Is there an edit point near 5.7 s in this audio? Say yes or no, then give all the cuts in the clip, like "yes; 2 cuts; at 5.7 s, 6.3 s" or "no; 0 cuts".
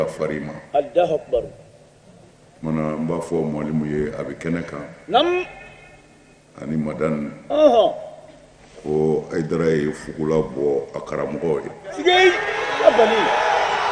no; 0 cuts